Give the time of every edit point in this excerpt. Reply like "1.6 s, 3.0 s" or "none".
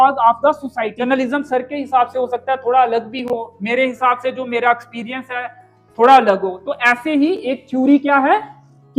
1.0 s

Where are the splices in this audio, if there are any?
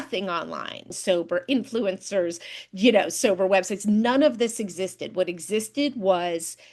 0.9 s

